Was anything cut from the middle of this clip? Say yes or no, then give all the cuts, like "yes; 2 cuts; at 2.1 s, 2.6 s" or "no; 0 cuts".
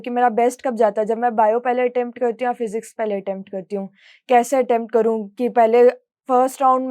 no; 0 cuts